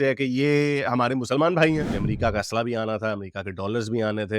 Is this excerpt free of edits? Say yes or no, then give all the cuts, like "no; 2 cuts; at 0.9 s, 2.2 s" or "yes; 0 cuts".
no; 1 cut; at 1.9 s